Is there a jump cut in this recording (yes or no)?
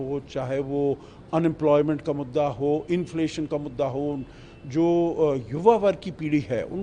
no